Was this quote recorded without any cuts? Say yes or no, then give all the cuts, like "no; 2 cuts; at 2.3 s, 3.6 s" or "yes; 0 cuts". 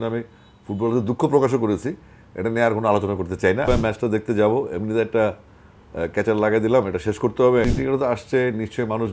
no; 2 cuts; at 3.7 s, 7.6 s